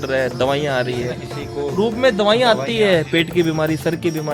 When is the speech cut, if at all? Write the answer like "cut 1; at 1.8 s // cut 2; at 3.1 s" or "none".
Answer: none

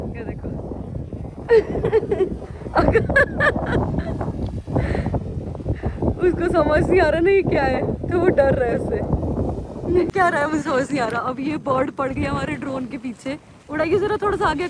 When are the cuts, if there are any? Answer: cut 1; at 10.1 s

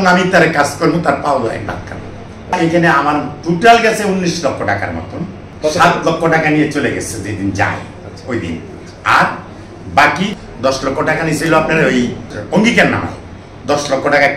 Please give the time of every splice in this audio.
cut 1; at 2.5 s // cut 2; at 5.4 s // cut 3; at 10.3 s // cut 4; at 12.3 s

